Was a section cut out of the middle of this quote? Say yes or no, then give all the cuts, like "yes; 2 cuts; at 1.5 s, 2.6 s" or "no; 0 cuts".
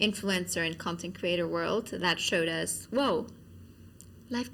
no; 0 cuts